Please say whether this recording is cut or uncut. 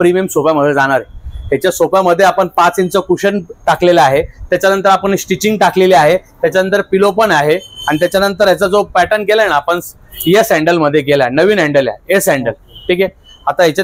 uncut